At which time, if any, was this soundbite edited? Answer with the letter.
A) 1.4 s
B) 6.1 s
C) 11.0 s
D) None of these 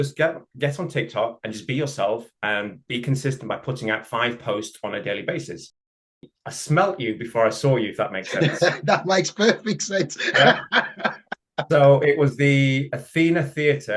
B